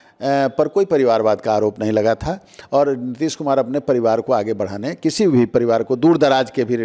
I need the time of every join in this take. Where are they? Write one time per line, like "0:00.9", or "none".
none